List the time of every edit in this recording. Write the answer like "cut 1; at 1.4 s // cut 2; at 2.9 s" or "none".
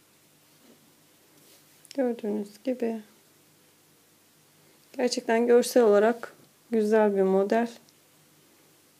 none